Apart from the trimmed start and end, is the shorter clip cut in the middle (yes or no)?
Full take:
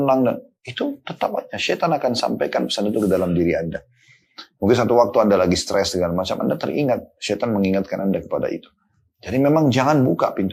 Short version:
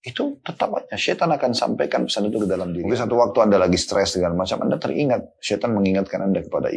yes